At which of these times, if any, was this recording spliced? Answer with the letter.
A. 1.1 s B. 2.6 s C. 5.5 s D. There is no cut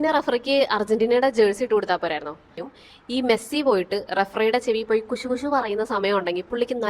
B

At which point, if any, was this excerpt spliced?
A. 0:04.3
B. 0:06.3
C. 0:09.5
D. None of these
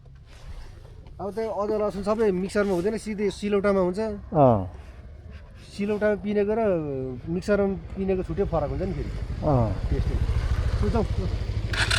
D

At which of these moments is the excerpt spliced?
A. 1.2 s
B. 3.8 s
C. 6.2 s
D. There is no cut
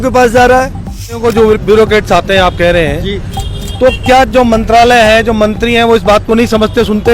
A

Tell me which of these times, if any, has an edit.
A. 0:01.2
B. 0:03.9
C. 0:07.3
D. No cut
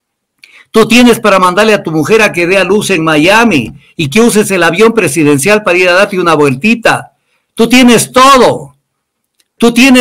D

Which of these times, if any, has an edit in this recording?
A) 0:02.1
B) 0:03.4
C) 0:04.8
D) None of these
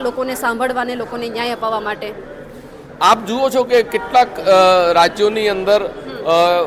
D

